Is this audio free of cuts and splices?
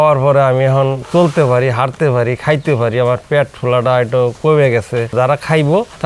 no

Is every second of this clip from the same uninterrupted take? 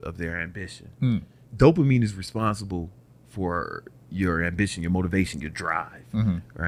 no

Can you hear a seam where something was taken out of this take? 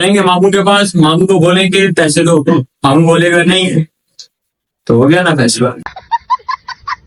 no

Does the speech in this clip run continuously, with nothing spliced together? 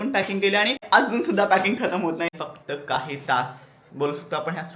no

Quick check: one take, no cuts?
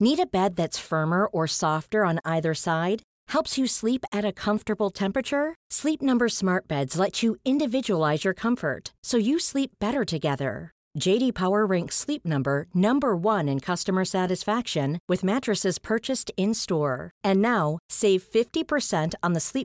yes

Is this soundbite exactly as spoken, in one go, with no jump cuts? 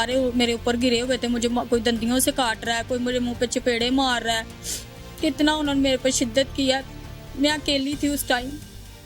yes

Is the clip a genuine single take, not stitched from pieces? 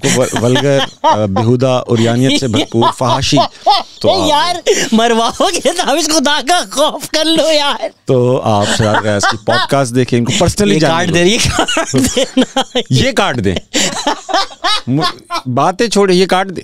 yes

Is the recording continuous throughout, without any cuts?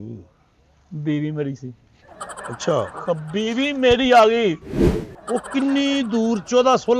no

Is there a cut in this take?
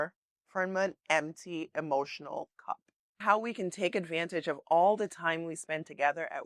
yes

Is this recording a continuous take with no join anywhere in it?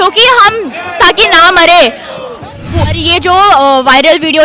no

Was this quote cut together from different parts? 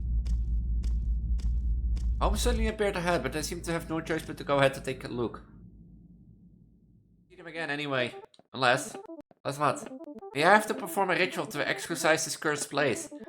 yes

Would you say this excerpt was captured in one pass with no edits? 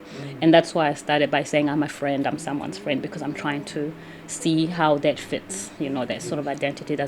yes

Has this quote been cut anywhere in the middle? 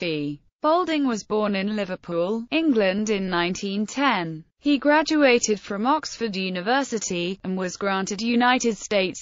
no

